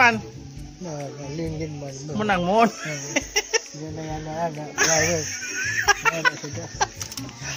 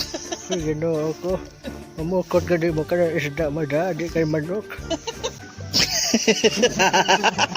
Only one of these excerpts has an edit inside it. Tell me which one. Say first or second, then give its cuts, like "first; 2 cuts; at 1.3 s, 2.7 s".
second; 1 cut; at 5.4 s